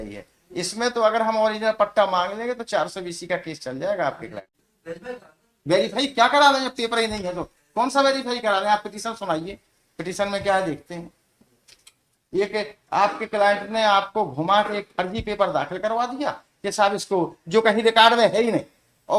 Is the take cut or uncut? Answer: cut